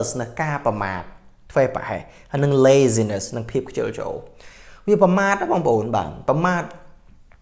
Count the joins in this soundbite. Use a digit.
0